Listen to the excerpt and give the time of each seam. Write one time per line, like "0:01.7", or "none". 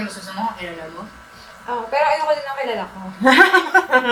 none